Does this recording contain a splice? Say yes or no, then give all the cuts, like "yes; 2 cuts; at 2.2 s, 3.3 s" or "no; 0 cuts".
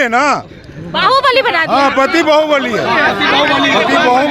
no; 0 cuts